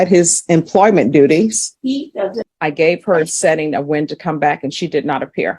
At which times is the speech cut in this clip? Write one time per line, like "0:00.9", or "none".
0:02.2